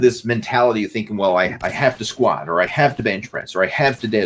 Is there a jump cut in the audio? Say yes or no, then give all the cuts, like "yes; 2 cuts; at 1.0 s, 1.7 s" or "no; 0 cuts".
no; 0 cuts